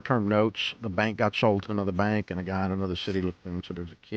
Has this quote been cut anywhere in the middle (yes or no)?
no